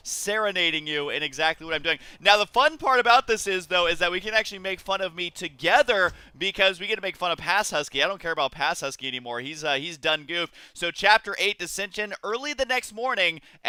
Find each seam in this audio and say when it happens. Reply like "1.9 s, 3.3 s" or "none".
none